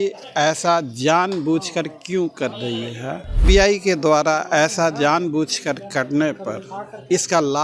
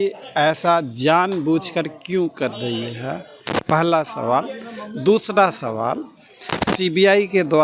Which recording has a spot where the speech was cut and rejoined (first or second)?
first